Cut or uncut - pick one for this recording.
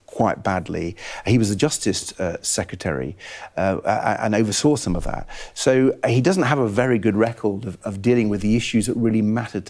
uncut